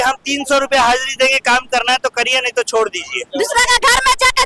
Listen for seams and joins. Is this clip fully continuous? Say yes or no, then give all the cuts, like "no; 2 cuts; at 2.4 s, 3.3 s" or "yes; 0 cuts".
no; 1 cut; at 3.2 s